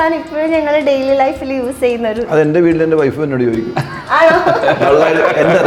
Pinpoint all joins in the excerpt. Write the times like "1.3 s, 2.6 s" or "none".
none